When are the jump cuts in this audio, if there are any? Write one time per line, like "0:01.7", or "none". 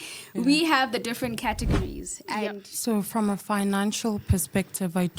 0:02.7